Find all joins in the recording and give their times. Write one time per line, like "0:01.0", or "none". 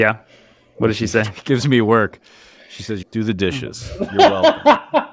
0:03.0